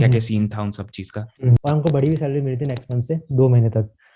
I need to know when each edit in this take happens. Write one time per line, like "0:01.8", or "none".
0:01.6